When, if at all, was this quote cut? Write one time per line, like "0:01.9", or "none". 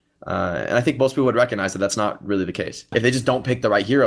0:02.9

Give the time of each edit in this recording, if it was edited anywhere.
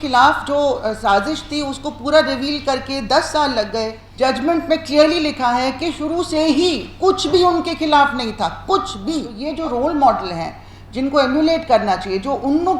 0:04.0
0:09.3

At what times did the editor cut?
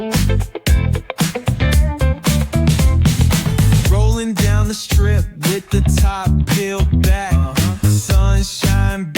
0:01.3

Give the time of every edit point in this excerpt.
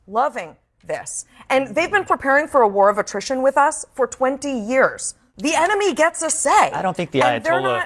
0:05.3

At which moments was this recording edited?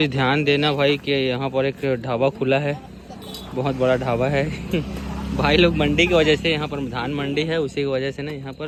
none

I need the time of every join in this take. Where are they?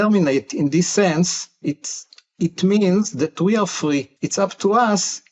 0:04.1

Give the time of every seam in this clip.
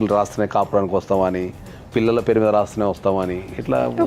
none

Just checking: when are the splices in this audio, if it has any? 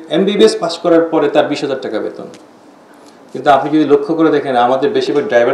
none

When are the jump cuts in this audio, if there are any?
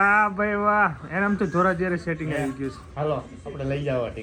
none

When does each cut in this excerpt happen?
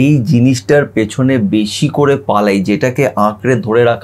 none

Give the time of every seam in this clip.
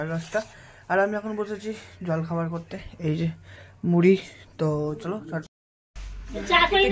0:05.5

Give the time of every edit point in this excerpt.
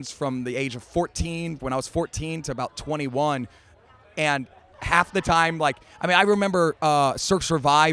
none

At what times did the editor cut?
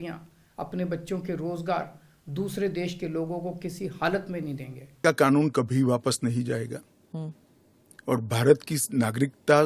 0:05.0

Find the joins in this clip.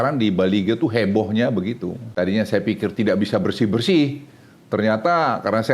0:02.0

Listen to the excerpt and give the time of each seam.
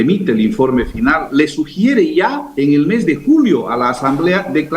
0:01.3
0:02.4

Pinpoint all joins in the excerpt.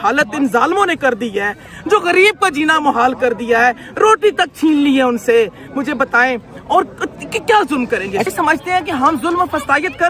0:08.2

